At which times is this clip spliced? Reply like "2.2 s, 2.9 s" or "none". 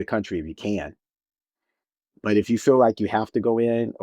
none